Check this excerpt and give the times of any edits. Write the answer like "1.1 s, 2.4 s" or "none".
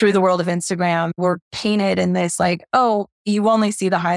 1.1 s